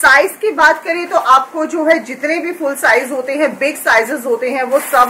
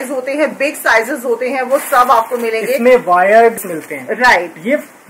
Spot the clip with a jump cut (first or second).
second